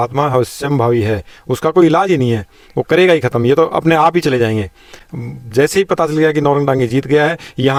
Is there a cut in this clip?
no; 0 cuts

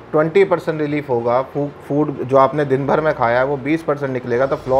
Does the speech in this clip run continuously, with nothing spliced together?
yes; 0 cuts

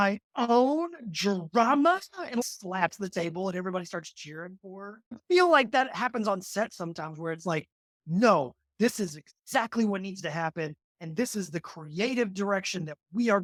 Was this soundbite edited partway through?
no; 0 cuts

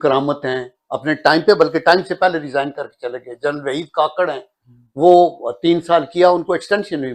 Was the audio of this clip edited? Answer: no; 0 cuts

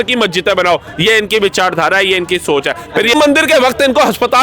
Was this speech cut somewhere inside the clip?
yes; 1 cut; at 3.1 s

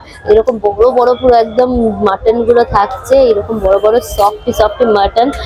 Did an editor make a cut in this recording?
no; 0 cuts

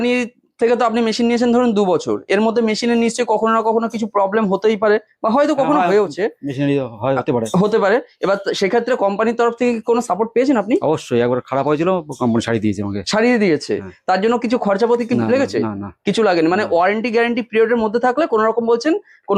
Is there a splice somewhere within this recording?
no; 0 cuts

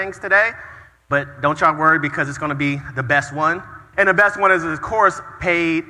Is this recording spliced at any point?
yes; 1 cut; at 3.8 s

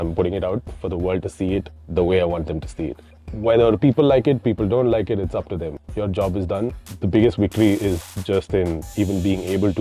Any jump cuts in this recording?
yes; 2 cuts; at 8.1 s, 8.8 s

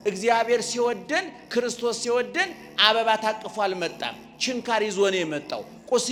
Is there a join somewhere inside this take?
no; 0 cuts

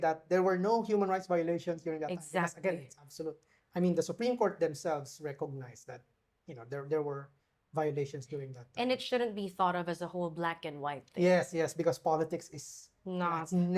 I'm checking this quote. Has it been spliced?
no; 0 cuts

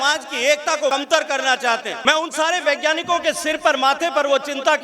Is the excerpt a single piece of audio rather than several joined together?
no; 2 cuts; at 0.9 s, 1.9 s

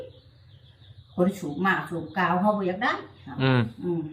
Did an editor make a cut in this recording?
no; 0 cuts

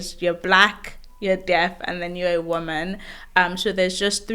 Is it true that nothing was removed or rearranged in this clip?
yes; 0 cuts

